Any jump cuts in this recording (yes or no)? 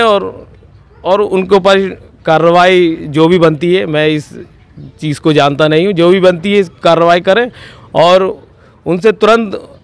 no